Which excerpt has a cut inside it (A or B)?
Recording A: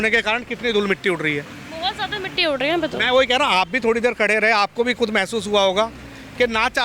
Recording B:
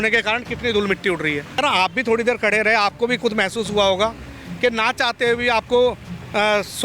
B